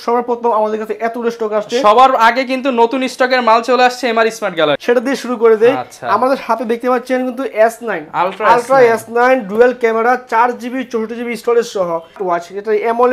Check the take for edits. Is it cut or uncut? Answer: cut